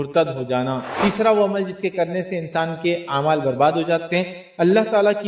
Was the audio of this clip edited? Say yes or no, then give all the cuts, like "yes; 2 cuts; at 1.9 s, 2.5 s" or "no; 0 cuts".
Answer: yes; 2 cuts; at 0.9 s, 4.0 s